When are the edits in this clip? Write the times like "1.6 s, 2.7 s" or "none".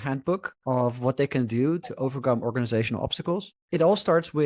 3.5 s